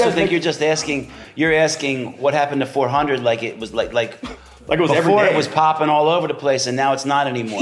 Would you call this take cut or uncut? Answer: uncut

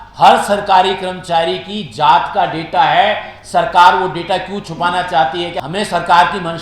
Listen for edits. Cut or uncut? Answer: cut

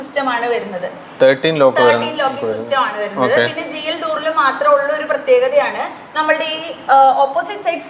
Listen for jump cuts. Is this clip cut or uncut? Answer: uncut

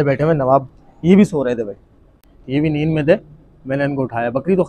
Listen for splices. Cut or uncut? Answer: uncut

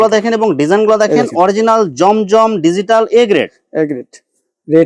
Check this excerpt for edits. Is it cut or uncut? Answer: uncut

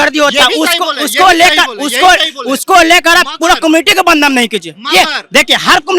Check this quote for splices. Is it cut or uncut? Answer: uncut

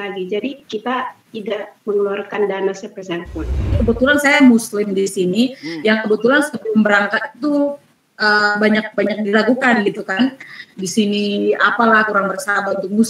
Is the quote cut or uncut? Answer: cut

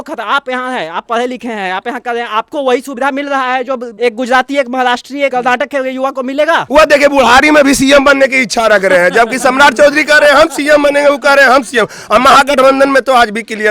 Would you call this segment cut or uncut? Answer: cut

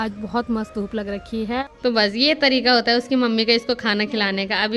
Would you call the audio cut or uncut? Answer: cut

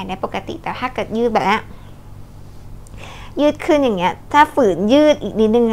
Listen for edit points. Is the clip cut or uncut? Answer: uncut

